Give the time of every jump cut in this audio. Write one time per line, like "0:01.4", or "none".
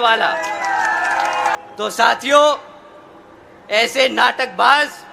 0:01.6